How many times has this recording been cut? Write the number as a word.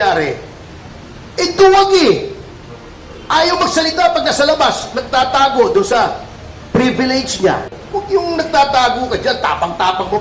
one